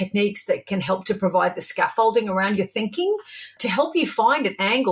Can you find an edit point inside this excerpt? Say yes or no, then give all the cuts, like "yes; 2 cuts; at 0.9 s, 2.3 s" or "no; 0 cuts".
yes; 1 cut; at 3.6 s